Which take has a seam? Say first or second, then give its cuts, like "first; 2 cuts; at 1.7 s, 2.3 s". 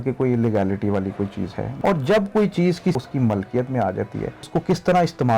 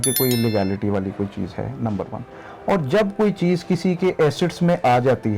first; 3 cuts; at 1.6 s, 3.0 s, 4.4 s